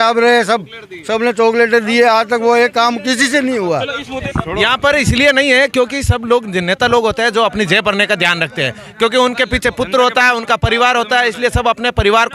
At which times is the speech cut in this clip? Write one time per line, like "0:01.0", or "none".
0:04.1